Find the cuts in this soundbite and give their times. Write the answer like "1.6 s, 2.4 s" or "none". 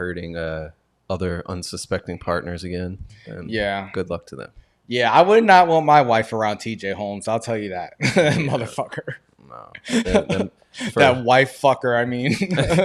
none